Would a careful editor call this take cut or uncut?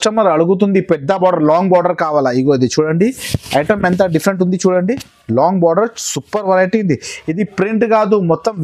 uncut